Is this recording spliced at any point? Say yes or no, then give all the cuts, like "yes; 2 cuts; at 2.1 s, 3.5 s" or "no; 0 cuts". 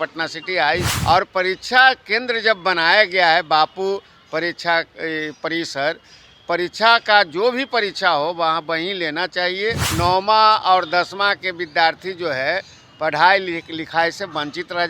yes; 2 cuts; at 0.9 s, 9.9 s